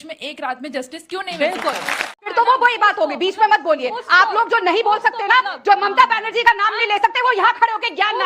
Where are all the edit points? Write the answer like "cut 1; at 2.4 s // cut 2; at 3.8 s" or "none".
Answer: cut 1; at 2.3 s